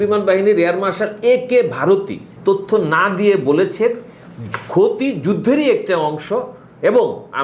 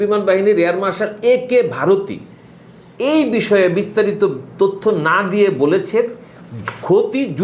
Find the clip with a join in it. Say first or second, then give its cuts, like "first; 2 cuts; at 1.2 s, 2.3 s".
first; 1 cut; at 2.3 s